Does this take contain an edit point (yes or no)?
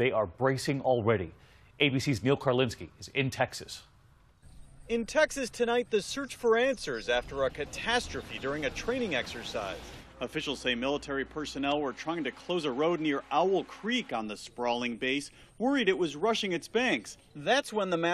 yes